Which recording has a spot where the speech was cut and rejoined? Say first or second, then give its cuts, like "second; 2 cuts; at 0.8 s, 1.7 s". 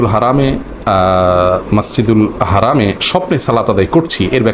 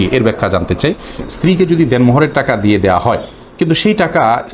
second; 1 cut; at 1.3 s